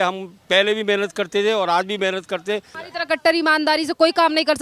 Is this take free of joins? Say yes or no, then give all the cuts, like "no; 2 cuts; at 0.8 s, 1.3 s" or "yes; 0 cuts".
no; 1 cut; at 2.8 s